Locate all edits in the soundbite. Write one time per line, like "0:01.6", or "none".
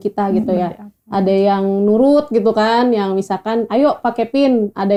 none